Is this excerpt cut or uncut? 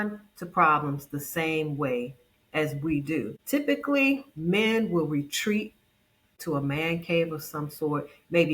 cut